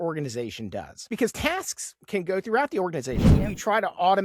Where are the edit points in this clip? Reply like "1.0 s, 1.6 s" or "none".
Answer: 3.3 s